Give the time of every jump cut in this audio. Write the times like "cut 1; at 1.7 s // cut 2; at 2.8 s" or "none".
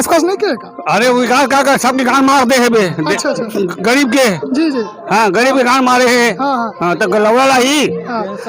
none